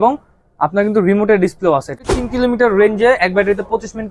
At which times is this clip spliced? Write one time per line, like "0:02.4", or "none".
0:02.0

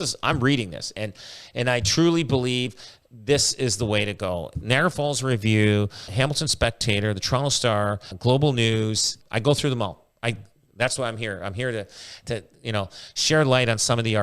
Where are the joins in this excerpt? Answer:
0:04.5
0:06.1
0:08.1
0:09.2

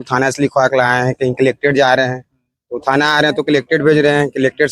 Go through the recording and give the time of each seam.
none

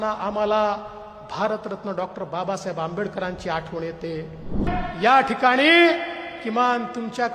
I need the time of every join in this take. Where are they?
0:04.6

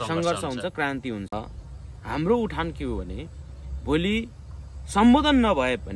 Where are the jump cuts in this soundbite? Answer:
0:01.3

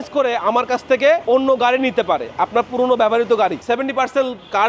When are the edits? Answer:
0:03.6

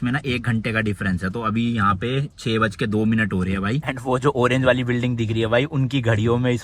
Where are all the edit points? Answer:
none

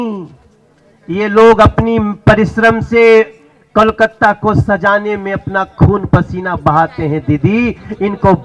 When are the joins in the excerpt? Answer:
none

